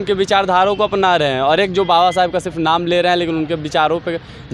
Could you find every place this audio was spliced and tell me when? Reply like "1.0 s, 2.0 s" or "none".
none